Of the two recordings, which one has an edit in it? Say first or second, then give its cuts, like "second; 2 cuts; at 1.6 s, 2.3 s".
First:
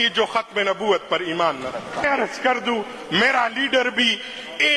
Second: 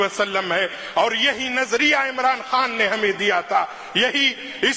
first; 1 cut; at 2.0 s